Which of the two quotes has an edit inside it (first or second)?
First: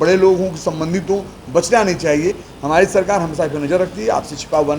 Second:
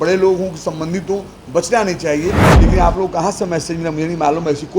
second